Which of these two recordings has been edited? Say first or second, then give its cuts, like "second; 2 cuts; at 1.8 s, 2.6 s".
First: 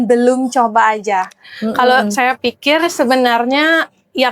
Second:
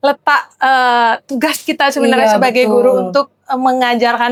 first; 1 cut; at 1.4 s